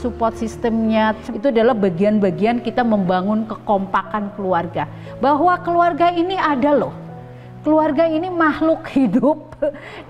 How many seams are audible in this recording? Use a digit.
1